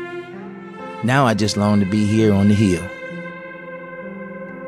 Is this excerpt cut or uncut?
cut